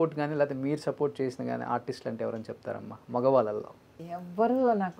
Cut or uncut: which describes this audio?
cut